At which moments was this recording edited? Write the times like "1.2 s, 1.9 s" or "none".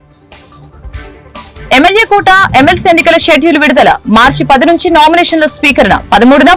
none